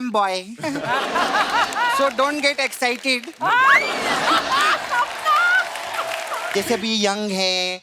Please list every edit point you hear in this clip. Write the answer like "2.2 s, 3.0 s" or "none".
6.5 s